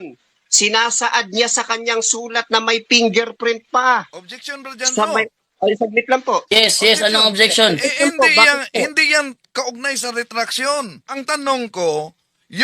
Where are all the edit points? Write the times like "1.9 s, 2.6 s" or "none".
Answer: 11.1 s